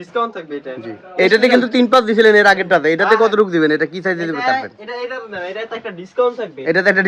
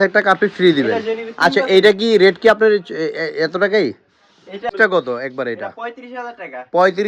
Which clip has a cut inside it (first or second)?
second